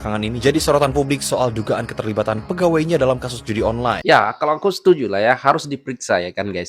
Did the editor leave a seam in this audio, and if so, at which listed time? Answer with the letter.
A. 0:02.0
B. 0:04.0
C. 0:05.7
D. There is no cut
B